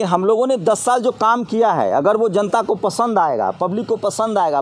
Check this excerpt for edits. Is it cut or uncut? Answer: uncut